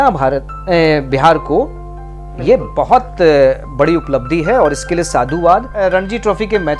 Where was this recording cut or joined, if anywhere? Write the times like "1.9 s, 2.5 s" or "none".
5.7 s